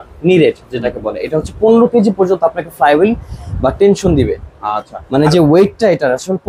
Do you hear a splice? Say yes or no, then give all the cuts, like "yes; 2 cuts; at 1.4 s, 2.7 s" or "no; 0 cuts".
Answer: no; 0 cuts